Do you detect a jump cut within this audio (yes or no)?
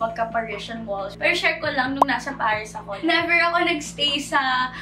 yes